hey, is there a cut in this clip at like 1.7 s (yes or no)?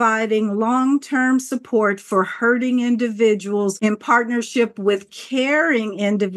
no